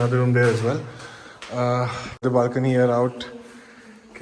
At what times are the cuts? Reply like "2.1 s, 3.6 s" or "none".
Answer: 2.2 s

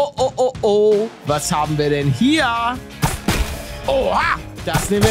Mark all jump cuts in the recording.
1.2 s, 2.9 s

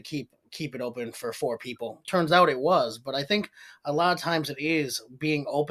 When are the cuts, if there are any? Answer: none

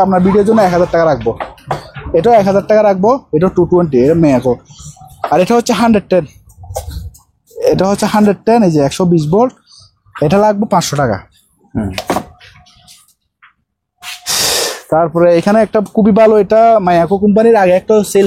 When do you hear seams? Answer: none

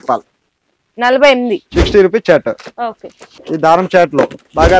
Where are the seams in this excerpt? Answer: 1.6 s

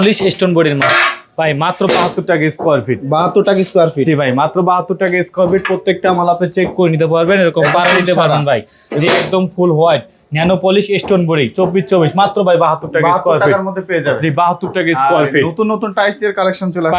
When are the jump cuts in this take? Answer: none

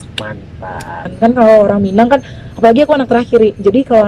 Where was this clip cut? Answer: 1.1 s

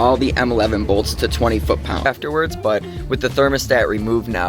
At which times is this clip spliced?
2.1 s

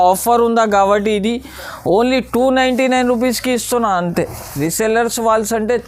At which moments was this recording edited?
4.4 s

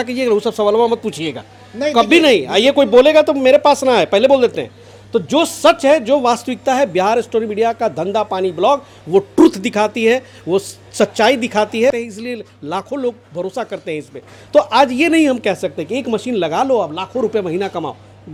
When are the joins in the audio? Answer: none

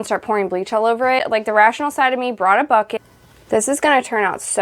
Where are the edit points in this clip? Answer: 1.2 s, 2.9 s

